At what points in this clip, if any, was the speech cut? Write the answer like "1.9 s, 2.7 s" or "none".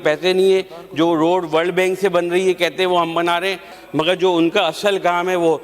3.7 s